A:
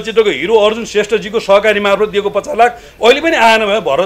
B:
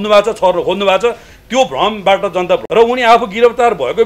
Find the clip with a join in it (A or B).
B